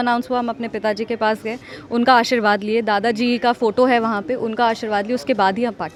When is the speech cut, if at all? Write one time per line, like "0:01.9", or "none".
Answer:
none